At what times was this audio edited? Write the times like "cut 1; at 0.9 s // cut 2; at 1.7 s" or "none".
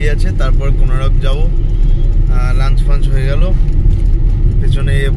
none